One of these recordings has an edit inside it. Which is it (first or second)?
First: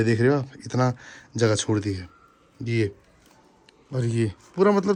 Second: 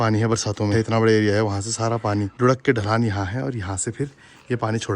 second